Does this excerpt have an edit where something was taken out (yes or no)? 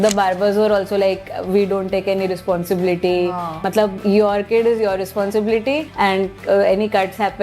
yes